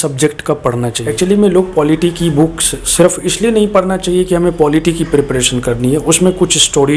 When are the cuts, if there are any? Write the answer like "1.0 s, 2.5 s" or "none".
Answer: 1.0 s

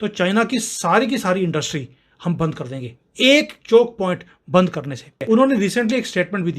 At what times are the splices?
5.2 s

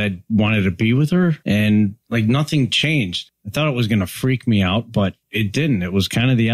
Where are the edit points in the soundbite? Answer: 1.4 s, 2.0 s, 3.2 s, 5.2 s

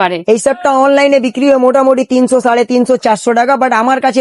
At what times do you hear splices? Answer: none

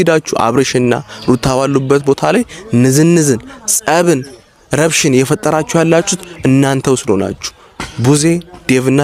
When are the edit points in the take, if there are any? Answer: none

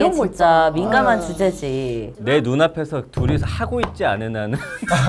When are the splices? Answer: 2.2 s

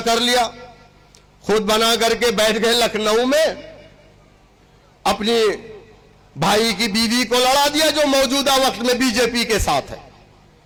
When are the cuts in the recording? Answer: none

